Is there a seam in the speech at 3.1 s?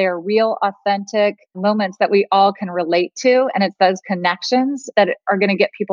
no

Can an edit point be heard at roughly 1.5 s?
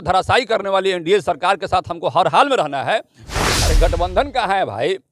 no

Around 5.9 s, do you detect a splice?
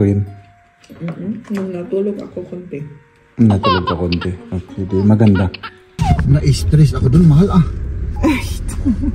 yes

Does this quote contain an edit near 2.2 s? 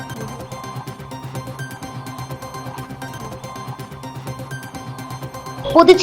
yes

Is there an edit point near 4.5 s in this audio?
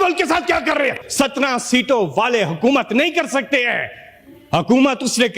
no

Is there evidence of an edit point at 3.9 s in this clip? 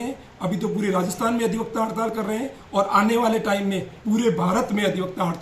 yes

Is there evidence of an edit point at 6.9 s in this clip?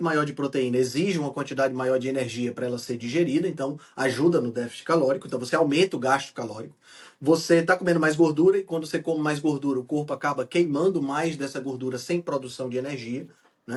no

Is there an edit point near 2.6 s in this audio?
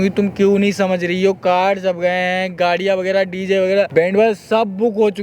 no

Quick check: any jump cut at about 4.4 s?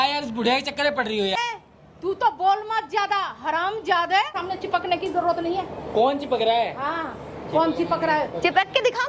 yes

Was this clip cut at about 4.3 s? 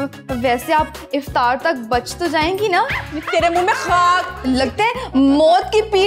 yes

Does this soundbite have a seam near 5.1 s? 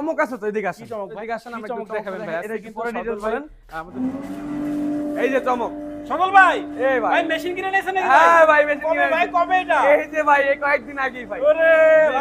no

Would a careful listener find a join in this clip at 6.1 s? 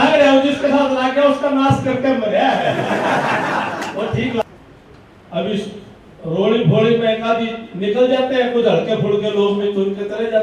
no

